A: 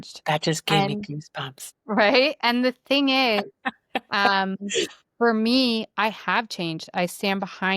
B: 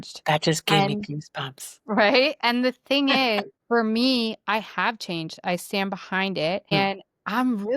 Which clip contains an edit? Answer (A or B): B